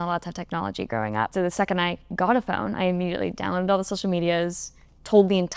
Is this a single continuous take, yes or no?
no